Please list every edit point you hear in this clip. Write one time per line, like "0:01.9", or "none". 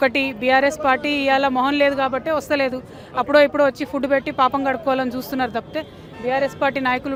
none